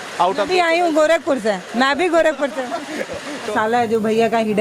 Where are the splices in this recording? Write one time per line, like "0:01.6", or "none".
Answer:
0:03.5